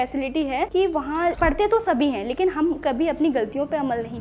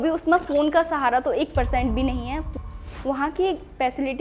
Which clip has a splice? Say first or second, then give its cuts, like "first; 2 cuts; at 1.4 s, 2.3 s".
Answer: second; 1 cut; at 2.6 s